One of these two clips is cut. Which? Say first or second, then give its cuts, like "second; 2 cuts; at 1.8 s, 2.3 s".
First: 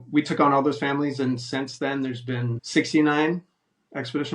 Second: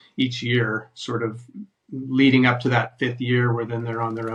first; 1 cut; at 2.6 s